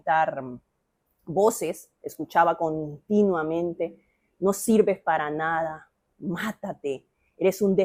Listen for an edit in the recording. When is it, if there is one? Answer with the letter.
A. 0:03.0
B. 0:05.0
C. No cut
C